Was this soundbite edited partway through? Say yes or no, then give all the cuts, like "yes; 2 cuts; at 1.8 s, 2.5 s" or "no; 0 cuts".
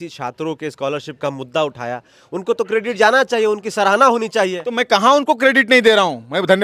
no; 0 cuts